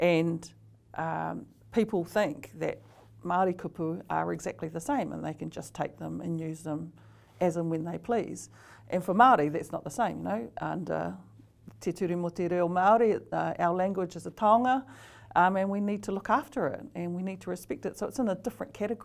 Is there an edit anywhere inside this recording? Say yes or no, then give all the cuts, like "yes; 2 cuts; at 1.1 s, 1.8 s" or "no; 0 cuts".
no; 0 cuts